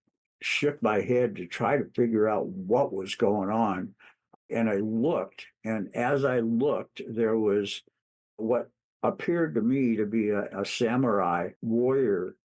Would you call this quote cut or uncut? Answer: cut